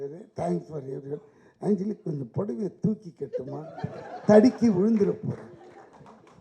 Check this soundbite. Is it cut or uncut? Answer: uncut